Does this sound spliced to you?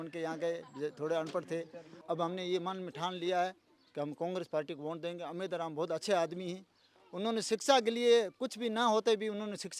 yes; 1 cut; at 2.0 s

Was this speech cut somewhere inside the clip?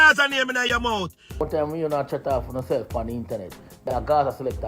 yes; 2 cuts; at 1.2 s, 3.7 s

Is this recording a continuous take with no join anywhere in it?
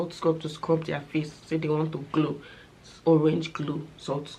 yes; 0 cuts

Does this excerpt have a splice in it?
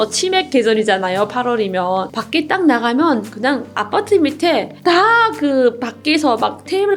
yes; 1 cut; at 2.2 s

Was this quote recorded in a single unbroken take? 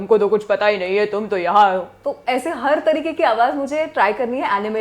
yes; 0 cuts

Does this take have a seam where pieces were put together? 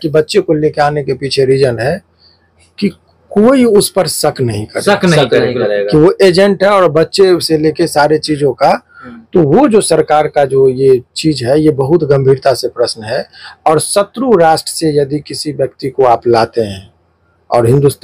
no; 0 cuts

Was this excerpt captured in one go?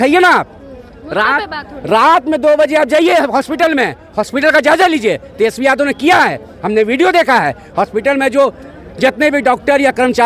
yes; 0 cuts

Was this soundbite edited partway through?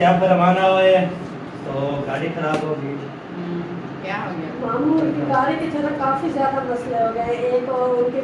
no; 0 cuts

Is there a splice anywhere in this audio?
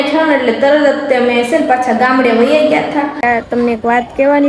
yes; 1 cut; at 3.2 s

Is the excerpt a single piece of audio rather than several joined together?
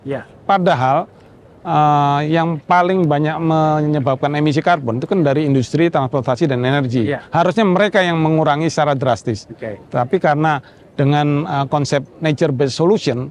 yes; 0 cuts

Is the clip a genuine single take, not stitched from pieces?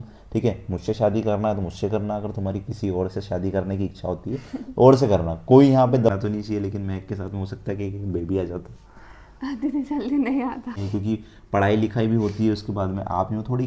no; 2 cuts; at 6.1 s, 10.8 s

